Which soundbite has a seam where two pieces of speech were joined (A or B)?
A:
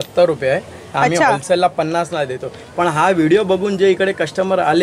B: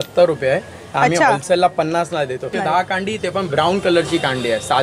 B